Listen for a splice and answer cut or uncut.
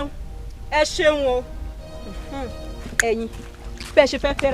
uncut